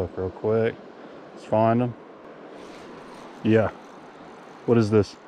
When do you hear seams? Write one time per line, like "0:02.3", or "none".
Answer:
0:02.2

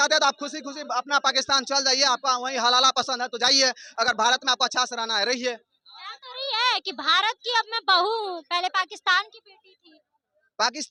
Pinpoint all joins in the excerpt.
none

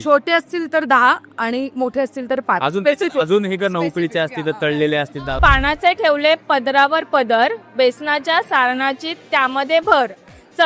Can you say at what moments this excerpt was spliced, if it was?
0:05.4

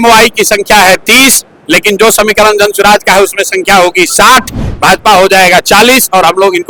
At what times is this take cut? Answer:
none

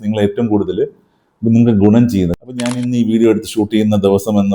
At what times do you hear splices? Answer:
0:02.3

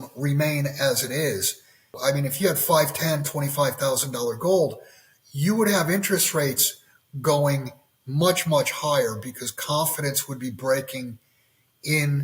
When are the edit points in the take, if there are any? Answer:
0:02.0

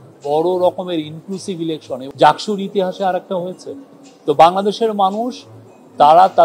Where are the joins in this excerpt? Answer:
0:02.1

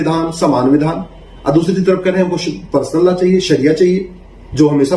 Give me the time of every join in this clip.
none

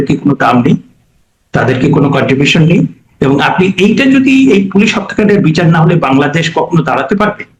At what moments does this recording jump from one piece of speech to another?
none

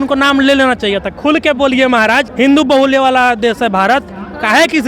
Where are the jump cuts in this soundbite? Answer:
0:02.3

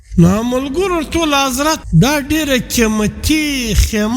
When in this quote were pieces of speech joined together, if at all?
0:01.8

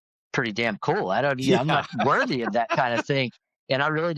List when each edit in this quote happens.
none

